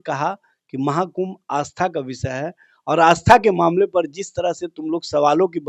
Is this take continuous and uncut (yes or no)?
yes